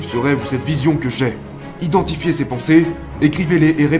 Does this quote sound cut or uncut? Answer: cut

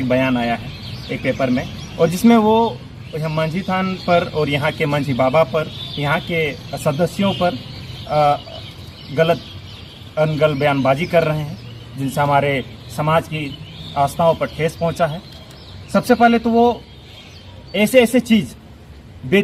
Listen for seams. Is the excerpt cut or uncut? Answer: uncut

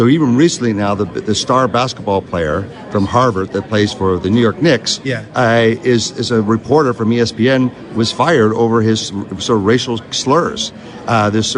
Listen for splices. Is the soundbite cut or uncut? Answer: uncut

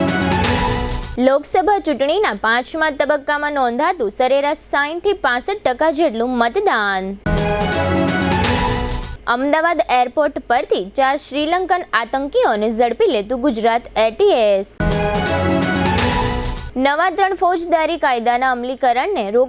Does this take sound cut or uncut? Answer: cut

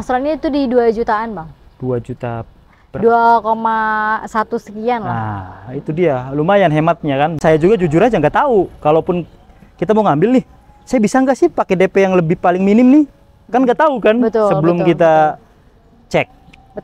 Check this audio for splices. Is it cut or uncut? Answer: cut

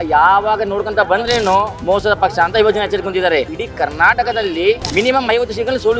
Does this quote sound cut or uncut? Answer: cut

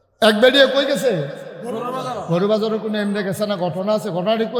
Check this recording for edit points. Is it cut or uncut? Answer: uncut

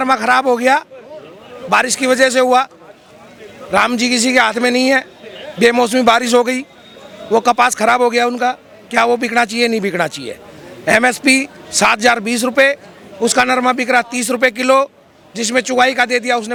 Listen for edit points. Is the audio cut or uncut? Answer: uncut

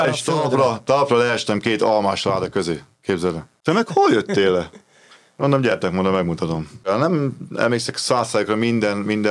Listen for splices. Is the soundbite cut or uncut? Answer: cut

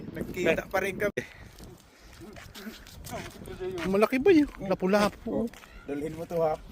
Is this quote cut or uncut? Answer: cut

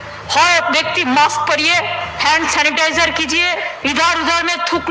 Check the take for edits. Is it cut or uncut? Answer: cut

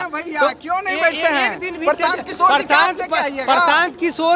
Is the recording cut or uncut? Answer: uncut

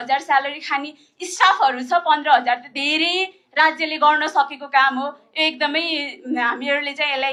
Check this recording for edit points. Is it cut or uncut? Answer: uncut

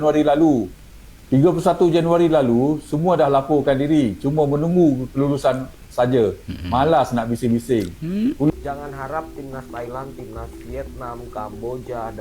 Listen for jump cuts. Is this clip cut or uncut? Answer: cut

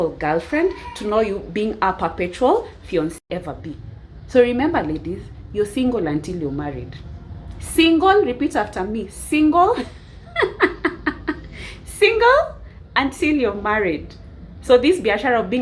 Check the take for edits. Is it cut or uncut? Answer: cut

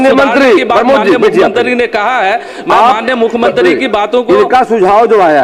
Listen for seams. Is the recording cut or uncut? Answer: uncut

